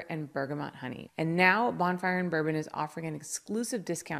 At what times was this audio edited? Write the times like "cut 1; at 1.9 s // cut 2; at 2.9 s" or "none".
cut 1; at 1.0 s